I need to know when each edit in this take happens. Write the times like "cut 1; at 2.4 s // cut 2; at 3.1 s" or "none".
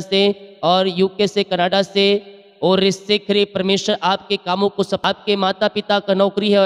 cut 1; at 5.0 s